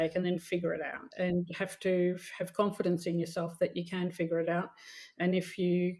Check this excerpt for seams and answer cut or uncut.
cut